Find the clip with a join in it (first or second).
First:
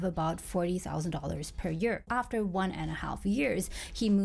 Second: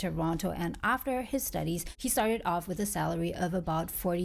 first